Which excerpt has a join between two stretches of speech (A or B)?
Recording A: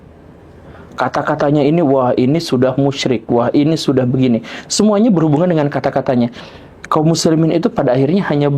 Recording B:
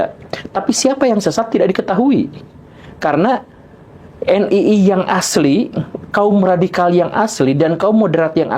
A